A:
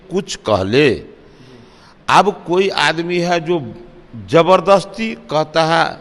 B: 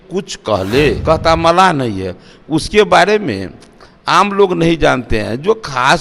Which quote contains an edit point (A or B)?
B